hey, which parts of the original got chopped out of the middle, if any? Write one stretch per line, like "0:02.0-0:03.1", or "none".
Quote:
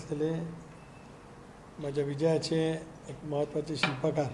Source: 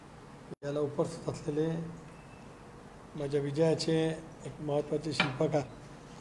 none